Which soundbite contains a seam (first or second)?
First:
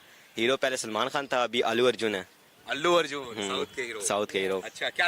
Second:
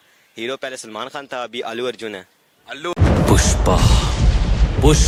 first